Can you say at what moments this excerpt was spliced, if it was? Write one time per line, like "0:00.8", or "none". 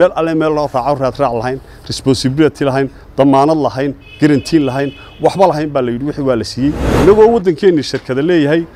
0:06.9